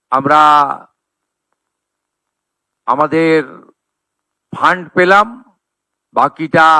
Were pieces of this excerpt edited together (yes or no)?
no